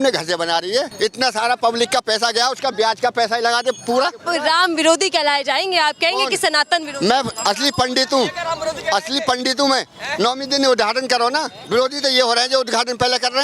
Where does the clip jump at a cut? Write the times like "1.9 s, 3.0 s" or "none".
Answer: 0.9 s, 4.2 s, 11.6 s